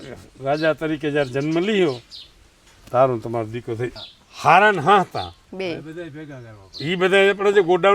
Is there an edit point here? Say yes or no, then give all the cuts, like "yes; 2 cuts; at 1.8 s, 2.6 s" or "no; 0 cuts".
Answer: yes; 1 cut; at 3.9 s